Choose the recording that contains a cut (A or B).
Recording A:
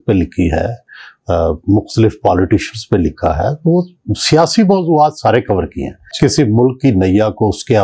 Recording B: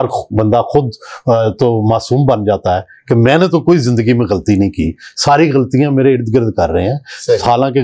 A